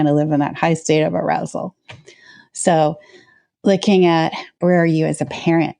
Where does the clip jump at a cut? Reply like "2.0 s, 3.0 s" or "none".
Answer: 4.6 s